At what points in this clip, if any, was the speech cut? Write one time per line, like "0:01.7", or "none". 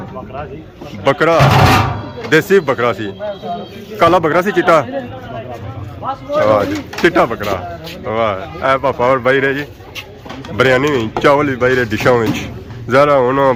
none